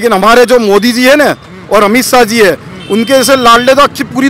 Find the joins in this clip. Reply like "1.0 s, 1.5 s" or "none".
none